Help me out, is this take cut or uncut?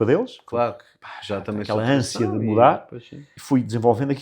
cut